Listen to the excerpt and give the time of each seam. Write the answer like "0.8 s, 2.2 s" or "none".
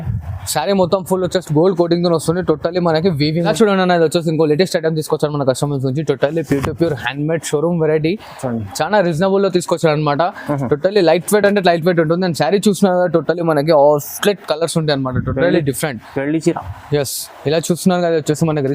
3.3 s